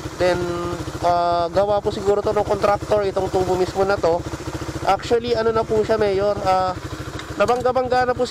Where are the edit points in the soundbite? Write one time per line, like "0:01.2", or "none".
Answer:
none

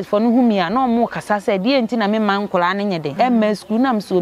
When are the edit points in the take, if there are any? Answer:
0:03.1

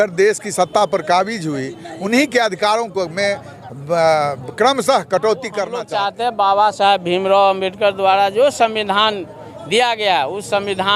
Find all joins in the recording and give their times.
0:05.8

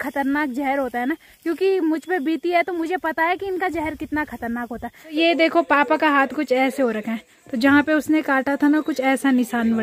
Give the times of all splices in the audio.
0:05.1

